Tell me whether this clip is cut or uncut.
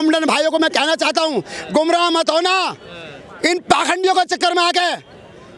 uncut